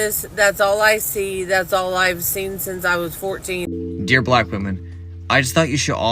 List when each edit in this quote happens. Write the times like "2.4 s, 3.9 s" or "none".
3.7 s